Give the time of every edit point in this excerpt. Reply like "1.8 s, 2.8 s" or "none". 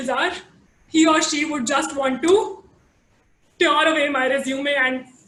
none

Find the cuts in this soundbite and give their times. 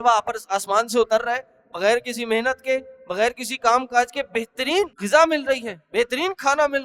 5.0 s

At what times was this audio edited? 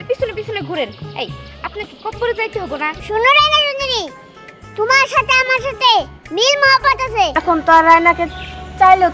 3.0 s, 7.4 s

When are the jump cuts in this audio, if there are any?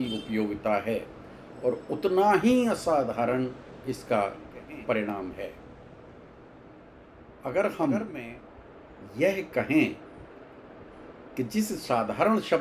6.8 s

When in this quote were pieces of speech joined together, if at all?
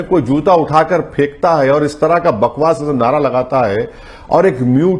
none

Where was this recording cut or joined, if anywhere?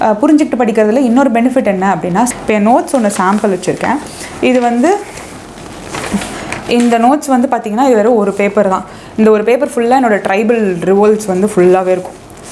2.3 s

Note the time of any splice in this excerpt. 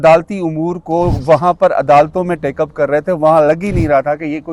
none

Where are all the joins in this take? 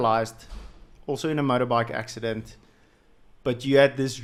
none

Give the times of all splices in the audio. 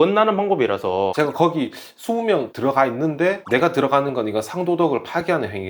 1.1 s

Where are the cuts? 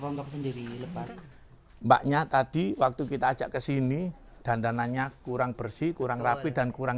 1.0 s

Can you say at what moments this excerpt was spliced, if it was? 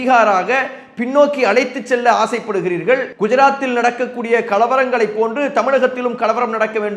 3.1 s

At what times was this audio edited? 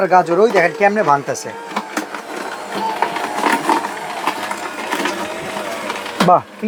none

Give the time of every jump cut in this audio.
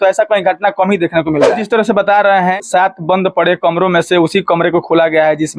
1.6 s

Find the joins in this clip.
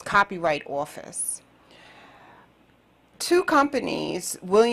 none

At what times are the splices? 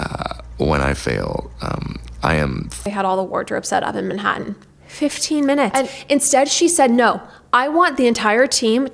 2.8 s

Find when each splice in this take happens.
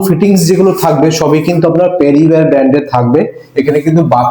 none

